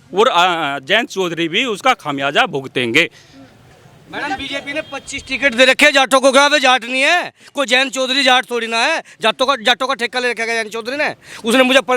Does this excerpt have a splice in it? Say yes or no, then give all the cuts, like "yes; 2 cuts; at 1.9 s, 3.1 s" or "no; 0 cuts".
no; 0 cuts